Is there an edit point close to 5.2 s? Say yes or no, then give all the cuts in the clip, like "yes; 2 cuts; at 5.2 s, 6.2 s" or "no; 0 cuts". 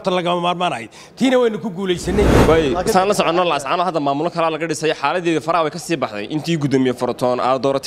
no; 1 cut; at 2.4 s